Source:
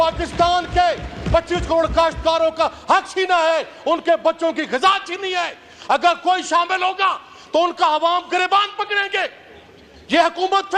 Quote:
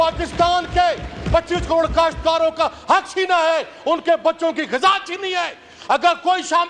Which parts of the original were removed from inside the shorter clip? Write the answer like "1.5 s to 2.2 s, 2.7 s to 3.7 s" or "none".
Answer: none